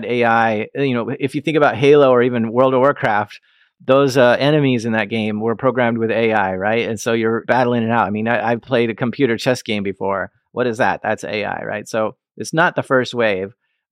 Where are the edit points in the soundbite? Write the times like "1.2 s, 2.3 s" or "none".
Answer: 8.6 s